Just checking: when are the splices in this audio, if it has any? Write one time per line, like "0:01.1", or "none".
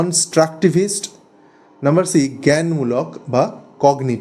none